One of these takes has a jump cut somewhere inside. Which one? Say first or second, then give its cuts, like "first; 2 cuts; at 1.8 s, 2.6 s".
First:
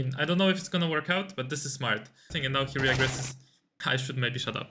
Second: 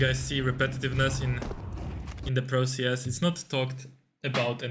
first; 2 cuts; at 2.3 s, 3.6 s